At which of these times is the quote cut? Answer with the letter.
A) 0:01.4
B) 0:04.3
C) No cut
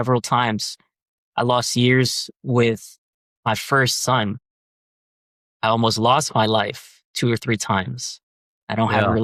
C